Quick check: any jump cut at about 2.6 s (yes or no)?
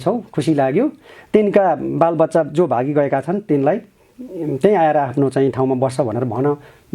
no